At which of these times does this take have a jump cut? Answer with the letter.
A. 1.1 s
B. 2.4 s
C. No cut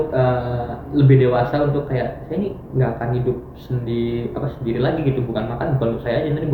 C